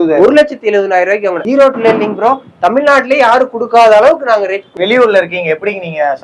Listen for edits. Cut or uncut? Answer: cut